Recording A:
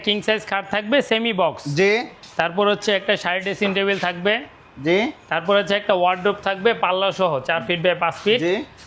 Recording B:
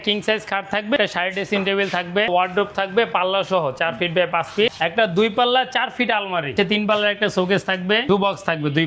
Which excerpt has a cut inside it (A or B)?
B